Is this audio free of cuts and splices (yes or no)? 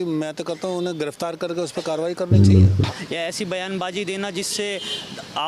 no